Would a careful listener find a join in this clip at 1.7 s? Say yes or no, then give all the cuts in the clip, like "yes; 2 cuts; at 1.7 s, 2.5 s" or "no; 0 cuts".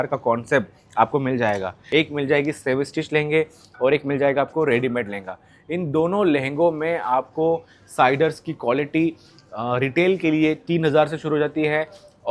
yes; 1 cut; at 1.7 s